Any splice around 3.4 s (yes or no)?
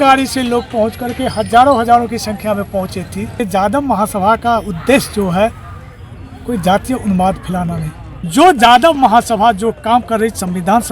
yes